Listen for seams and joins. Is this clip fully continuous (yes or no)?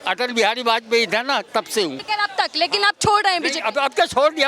no